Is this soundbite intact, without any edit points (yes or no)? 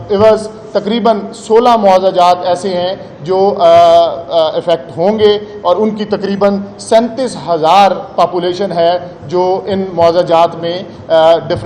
yes